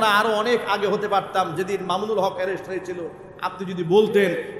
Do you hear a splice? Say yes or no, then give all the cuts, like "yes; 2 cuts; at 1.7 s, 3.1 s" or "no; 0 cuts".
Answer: no; 0 cuts